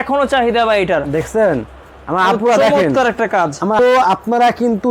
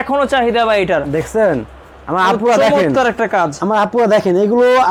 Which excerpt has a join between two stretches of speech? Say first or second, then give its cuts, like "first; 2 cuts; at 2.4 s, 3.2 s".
first; 1 cut; at 3.8 s